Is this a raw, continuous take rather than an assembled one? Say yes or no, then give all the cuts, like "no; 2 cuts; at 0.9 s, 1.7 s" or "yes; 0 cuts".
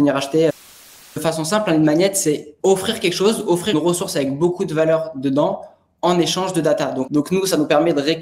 no; 4 cuts; at 1.1 s, 2.5 s, 3.7 s, 7.0 s